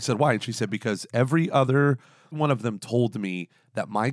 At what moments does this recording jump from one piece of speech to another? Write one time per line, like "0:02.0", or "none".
0:02.4